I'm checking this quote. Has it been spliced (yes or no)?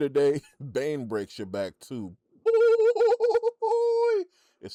no